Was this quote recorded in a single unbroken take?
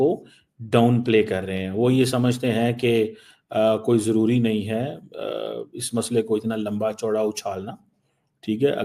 yes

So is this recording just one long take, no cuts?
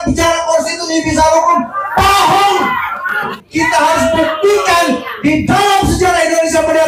no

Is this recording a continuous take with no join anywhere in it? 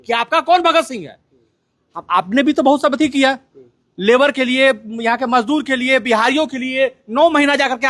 yes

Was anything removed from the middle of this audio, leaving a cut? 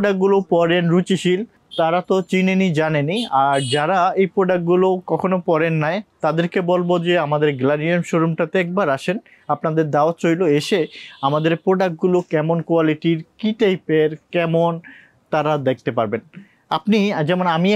no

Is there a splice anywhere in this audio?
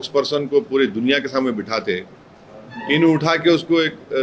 no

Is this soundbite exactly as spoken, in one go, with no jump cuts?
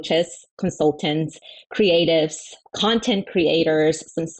no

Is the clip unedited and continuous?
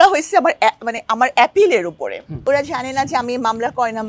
no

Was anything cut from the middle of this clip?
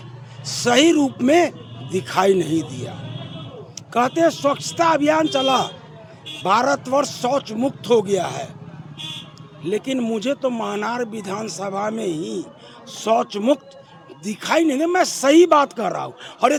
no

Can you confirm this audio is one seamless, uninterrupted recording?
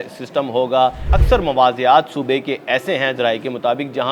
no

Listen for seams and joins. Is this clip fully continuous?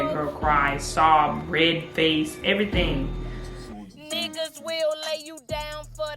no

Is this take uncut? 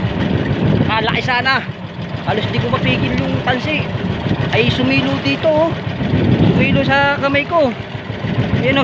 yes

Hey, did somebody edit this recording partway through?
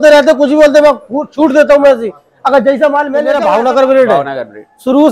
yes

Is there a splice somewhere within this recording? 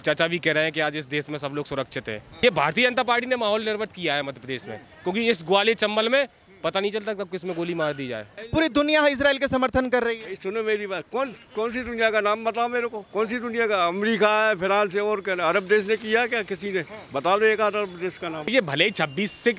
yes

